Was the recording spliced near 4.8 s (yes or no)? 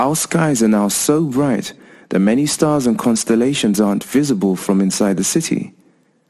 yes